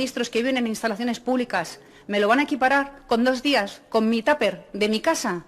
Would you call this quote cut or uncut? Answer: uncut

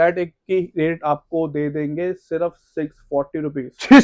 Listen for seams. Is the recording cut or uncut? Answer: uncut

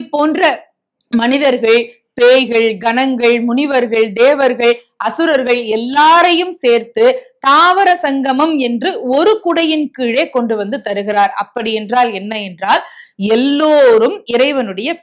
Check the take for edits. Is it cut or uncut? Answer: uncut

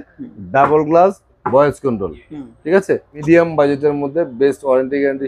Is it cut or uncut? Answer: cut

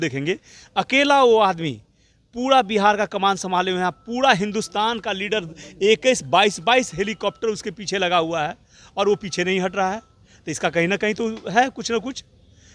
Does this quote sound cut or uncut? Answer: uncut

